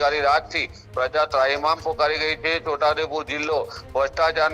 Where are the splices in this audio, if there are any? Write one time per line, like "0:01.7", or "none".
none